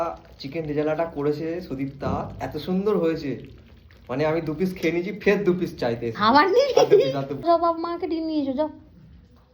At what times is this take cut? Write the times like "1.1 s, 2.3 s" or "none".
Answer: 7.5 s